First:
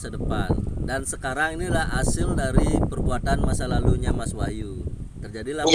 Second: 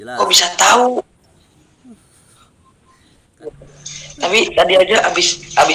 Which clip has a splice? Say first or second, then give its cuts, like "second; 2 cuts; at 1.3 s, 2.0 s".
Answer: second; 1 cut; at 3.2 s